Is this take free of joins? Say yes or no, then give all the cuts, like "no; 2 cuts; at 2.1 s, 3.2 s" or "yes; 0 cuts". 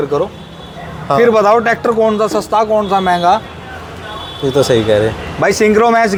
yes; 0 cuts